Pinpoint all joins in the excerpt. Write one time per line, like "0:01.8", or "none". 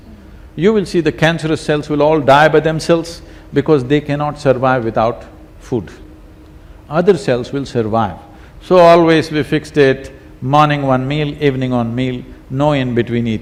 none